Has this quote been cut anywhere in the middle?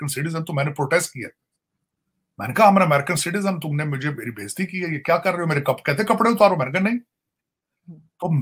no; 0 cuts

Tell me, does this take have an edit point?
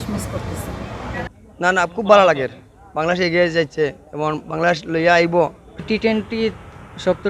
yes; 2 cuts; at 1.2 s, 5.7 s

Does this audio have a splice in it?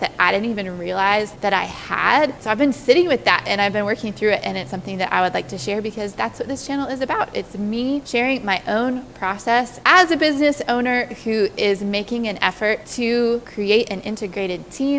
yes; 1 cut; at 2.4 s

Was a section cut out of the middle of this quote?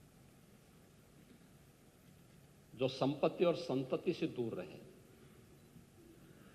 no; 0 cuts

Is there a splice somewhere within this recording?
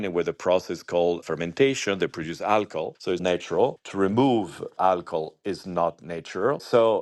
yes; 1 cut; at 3.2 s

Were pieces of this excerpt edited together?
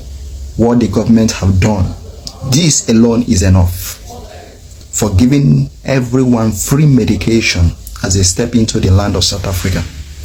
no; 0 cuts

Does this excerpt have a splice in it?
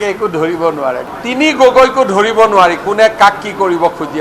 yes; 1 cut; at 1.0 s

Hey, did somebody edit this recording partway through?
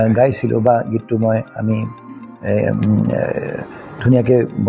no; 0 cuts

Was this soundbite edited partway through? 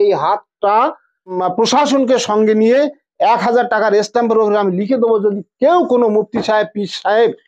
yes; 1 cut; at 1.4 s

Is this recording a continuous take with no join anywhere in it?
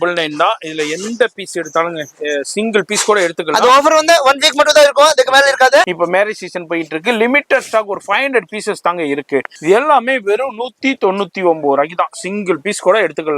no; 2 cuts; at 5.9 s, 9.5 s

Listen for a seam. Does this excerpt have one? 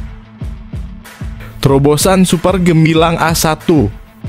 yes; 1 cut; at 1.6 s

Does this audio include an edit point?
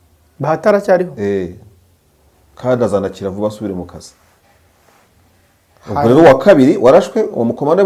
no; 0 cuts

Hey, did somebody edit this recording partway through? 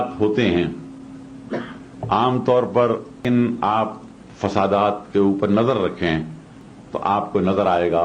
yes; 1 cut; at 3.2 s

